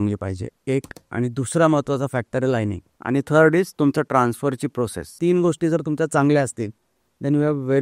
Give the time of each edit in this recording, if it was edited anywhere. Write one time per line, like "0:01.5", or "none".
0:02.9
0:05.1

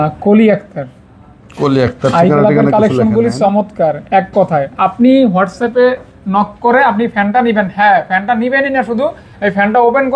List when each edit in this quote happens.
none

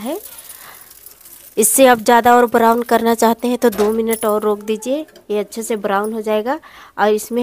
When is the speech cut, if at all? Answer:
none

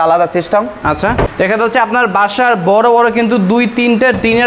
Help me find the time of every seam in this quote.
0:01.3

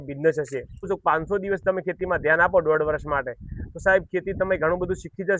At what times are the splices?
0:00.9

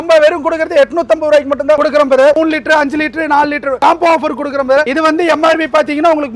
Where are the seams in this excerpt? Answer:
0:02.3
0:03.8
0:04.9

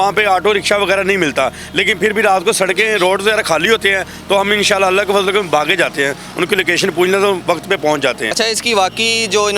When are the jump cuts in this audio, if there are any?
none

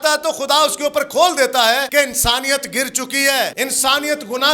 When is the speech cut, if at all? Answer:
0:01.9
0:03.5

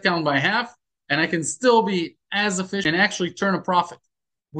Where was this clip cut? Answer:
0:02.8

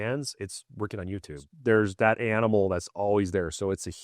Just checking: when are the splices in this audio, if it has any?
0:01.5

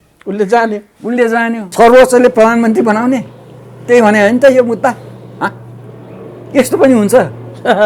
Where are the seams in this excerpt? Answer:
0:01.6

